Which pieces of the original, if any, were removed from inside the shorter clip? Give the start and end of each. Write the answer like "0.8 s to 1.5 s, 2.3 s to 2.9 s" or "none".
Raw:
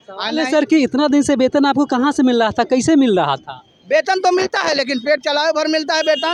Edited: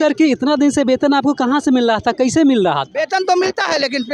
3.4 s to 3.9 s